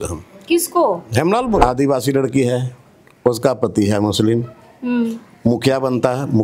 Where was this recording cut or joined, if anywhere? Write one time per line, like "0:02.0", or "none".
0:01.6